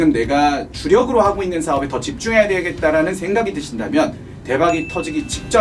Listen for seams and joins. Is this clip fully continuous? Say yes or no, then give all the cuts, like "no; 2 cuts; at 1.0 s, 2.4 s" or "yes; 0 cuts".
yes; 0 cuts